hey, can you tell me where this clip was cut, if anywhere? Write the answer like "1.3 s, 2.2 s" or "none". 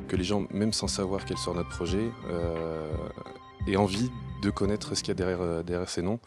4.5 s